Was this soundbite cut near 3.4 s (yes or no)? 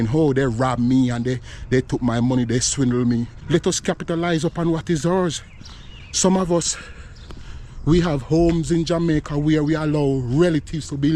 yes